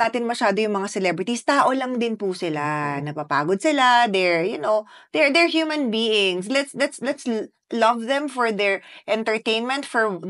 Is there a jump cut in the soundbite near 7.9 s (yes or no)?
no